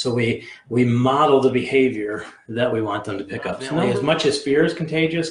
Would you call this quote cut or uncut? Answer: cut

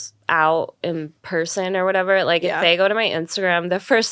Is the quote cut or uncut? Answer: uncut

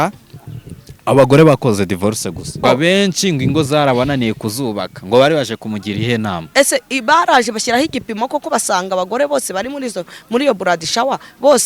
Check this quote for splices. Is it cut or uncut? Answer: cut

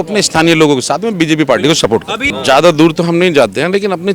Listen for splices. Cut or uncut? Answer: cut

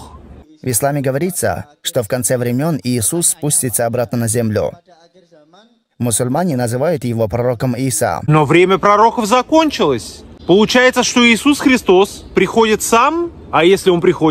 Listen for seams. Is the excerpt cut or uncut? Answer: uncut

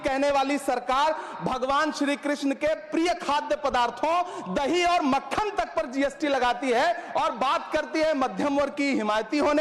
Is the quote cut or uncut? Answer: uncut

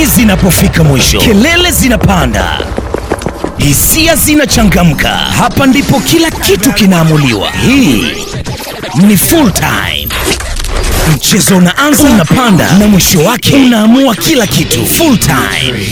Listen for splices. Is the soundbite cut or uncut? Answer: uncut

